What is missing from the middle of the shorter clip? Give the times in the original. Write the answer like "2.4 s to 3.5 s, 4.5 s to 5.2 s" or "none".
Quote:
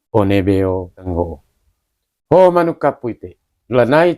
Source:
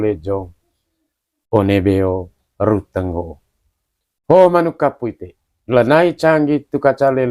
2.5 s to 3.0 s